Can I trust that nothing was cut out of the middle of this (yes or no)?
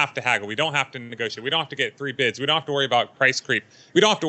yes